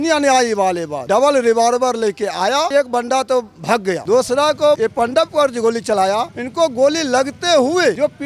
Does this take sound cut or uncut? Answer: cut